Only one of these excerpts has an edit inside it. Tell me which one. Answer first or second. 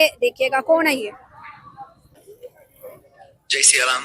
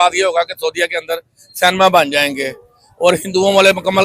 first